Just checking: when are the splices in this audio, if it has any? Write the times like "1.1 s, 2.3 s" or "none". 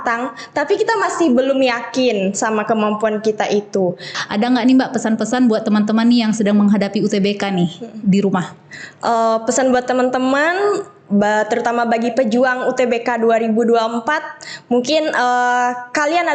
4.1 s